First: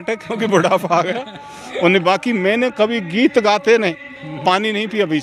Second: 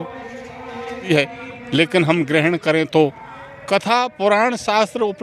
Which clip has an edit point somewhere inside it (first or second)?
second